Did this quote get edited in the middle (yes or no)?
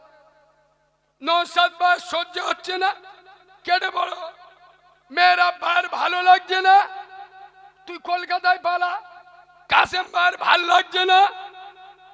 no